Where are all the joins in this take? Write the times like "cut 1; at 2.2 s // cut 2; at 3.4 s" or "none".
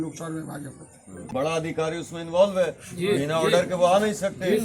cut 1; at 1.3 s

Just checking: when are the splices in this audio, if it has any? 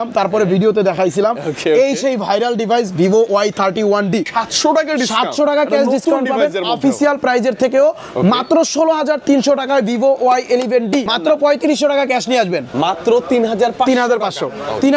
cut 1; at 4.3 s // cut 2; at 11.1 s

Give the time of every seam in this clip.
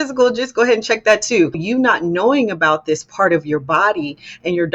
cut 1; at 1.6 s

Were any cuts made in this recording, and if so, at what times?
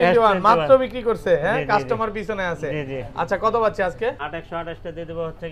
cut 1; at 4.2 s

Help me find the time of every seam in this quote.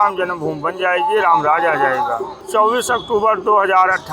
cut 1; at 2.5 s

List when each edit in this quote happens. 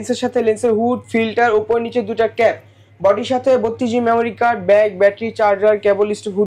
none

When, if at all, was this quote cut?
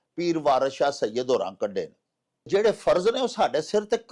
cut 1; at 2.5 s

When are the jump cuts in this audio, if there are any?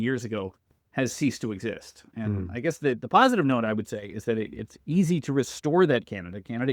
none

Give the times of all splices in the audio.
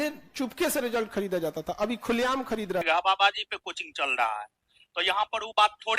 cut 1; at 2.8 s

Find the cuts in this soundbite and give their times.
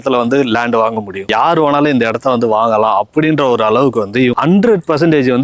cut 1; at 1.3 s // cut 2; at 4.4 s

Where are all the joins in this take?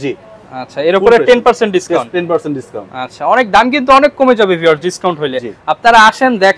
none

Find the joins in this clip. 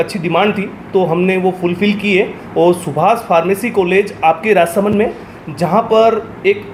none

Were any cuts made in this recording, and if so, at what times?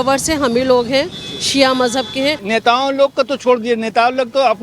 cut 1; at 2.4 s

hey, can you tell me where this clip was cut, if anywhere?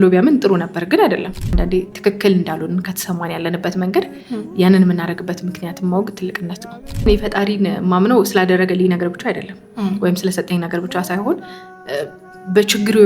cut 1; at 1.4 s // cut 2; at 7.1 s

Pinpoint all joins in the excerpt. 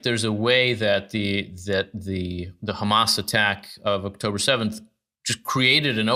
none

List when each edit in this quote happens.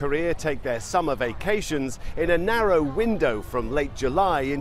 cut 1; at 2.0 s

